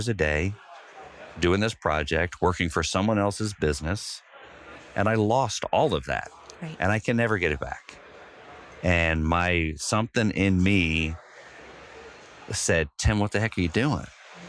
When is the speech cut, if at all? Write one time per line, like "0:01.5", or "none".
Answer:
none